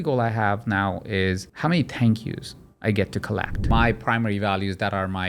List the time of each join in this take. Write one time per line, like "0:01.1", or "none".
0:01.5
0:03.6